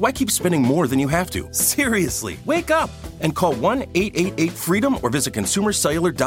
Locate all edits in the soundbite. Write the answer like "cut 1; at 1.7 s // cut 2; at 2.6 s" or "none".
cut 1; at 1.9 s